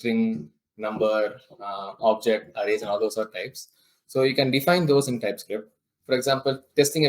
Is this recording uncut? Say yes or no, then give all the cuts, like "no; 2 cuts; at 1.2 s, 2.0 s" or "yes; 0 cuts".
no; 1 cut; at 5.9 s